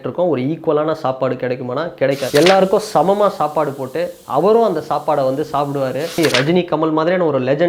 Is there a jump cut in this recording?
yes; 2 cuts; at 2.2 s, 6.1 s

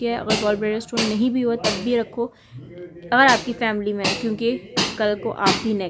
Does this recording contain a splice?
no; 0 cuts

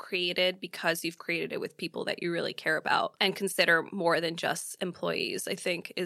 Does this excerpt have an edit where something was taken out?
no; 0 cuts

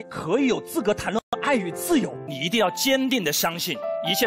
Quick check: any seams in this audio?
yes; 1 cut; at 2.3 s

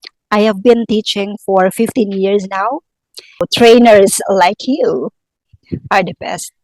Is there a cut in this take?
yes; 1 cut; at 3.4 s

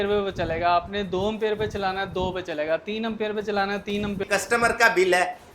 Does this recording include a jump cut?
yes; 1 cut; at 4.2 s

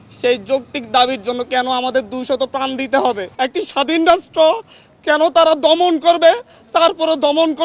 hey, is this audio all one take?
no; 1 cut; at 3.3 s

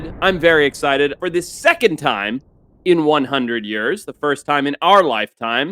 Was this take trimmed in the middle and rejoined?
yes; 1 cut; at 1.2 s

